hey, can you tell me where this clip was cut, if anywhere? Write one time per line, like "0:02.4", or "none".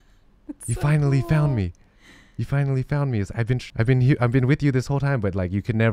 0:03.7